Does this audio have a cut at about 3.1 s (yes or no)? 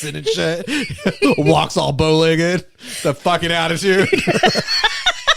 no